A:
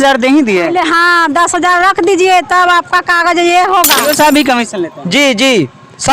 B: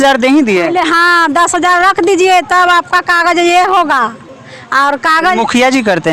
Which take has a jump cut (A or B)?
A